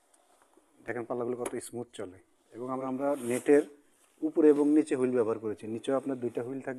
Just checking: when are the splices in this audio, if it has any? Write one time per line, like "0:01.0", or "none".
0:02.8

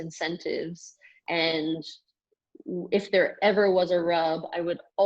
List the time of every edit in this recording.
0:01.2

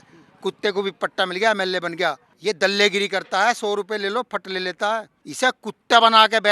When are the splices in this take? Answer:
0:02.3
0:05.2

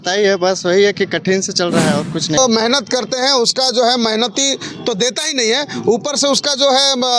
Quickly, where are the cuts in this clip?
0:02.4

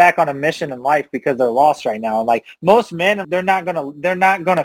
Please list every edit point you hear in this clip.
0:03.2

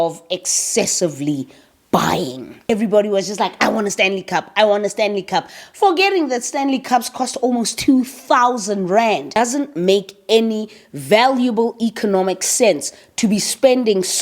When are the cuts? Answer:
0:02.6
0:09.4

